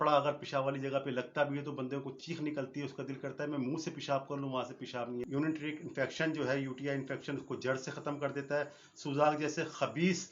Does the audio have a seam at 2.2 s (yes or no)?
no